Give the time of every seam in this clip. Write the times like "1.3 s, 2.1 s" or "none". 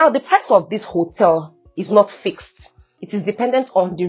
none